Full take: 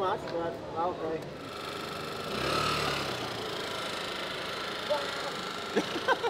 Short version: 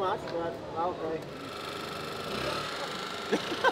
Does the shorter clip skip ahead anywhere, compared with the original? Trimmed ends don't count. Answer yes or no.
yes